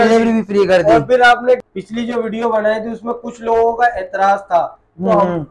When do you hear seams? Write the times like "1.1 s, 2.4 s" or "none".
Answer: 1.7 s